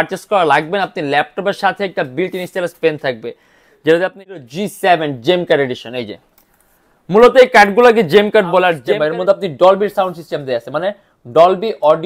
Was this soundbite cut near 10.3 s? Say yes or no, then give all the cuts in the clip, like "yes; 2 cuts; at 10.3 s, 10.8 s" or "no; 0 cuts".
no; 2 cuts; at 4.4 s, 8.8 s